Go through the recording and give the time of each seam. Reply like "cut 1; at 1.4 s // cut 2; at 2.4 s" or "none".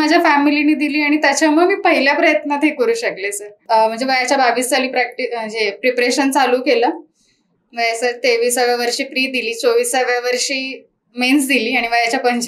cut 1; at 3.6 s